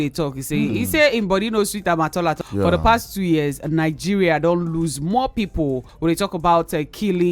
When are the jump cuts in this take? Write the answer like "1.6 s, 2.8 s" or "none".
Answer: 2.4 s, 5.9 s